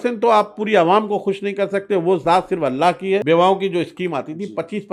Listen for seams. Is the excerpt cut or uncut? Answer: cut